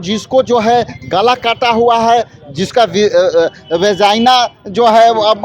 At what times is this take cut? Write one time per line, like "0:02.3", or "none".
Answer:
none